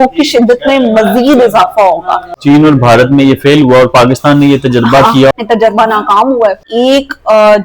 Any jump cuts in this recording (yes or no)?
yes